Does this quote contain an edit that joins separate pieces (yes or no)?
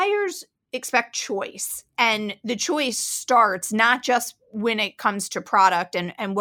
no